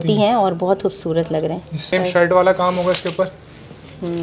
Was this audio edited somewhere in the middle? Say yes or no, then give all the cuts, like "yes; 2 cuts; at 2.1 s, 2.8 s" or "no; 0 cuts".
yes; 1 cut; at 1.8 s